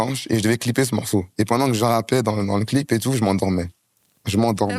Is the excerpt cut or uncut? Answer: cut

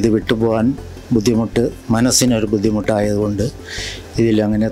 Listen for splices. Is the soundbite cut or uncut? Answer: uncut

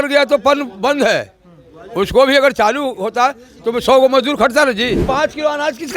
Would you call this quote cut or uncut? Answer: cut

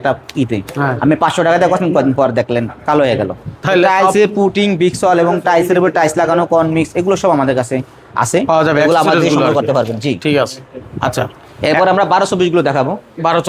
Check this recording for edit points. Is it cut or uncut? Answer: uncut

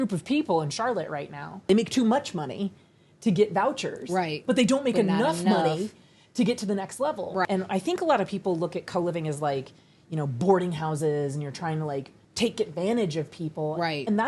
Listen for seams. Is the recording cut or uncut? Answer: cut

